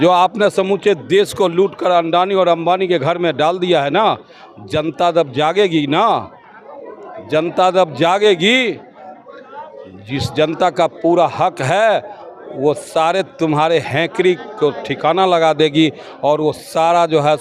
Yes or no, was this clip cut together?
no